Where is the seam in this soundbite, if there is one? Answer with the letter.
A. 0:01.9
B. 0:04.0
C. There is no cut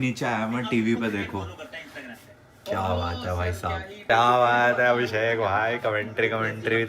B